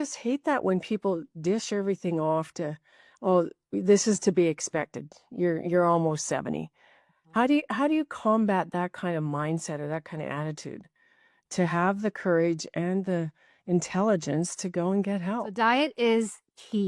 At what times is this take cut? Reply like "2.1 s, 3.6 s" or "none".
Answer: 15.5 s